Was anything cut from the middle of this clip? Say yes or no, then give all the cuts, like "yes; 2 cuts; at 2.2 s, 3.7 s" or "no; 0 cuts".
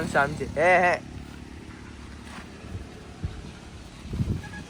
no; 0 cuts